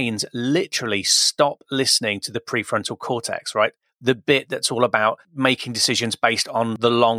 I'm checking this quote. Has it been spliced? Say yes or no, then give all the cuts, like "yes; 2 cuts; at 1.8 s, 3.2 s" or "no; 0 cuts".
no; 0 cuts